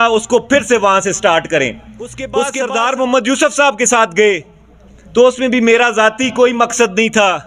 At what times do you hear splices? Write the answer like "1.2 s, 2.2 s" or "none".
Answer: 2.5 s